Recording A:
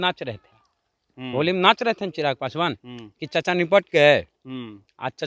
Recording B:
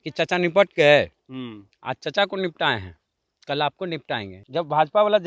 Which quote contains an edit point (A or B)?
B